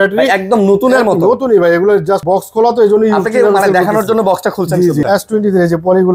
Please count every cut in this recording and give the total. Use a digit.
2